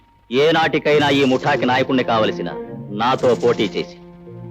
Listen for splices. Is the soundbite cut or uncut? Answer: uncut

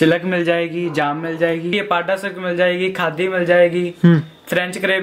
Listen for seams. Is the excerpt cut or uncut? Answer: cut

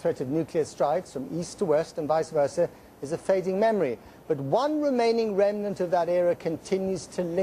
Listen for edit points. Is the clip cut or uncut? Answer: uncut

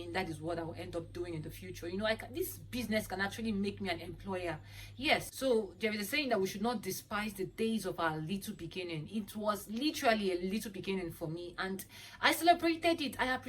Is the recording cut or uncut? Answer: cut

